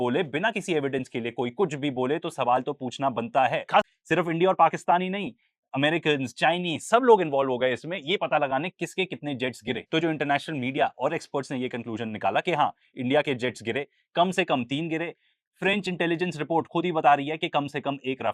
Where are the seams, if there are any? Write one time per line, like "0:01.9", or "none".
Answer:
0:03.9